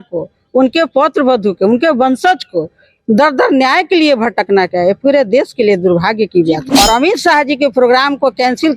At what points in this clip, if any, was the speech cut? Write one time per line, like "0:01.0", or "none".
0:06.6